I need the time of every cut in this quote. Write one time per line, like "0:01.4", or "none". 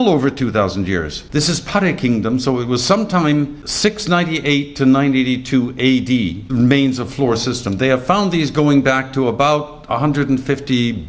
0:01.2
0:03.6
0:06.4